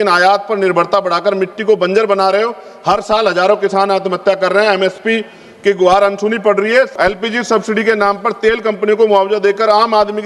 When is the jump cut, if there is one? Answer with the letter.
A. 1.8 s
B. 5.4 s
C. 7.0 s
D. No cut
C